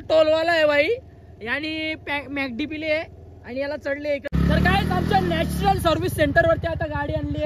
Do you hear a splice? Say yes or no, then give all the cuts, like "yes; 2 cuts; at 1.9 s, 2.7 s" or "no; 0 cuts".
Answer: yes; 1 cut; at 4.2 s